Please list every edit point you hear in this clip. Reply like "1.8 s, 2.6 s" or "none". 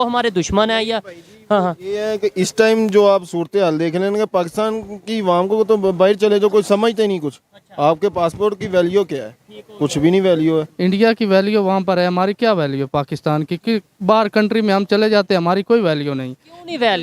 10.7 s